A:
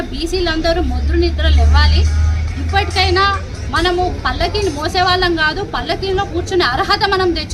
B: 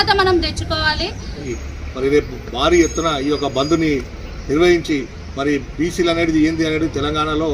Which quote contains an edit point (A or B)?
B